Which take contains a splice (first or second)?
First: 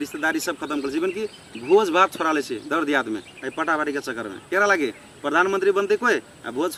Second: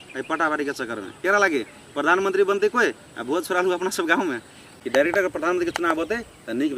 second